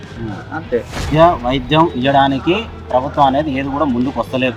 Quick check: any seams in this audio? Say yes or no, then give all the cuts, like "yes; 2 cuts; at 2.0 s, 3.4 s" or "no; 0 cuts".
yes; 1 cut; at 1.0 s